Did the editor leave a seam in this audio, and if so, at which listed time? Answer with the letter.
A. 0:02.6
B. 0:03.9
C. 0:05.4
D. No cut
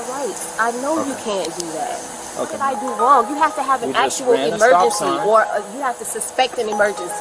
A